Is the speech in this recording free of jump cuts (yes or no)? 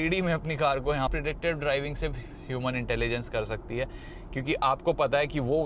no